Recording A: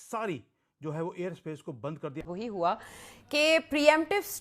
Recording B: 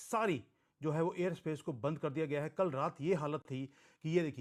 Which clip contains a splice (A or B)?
A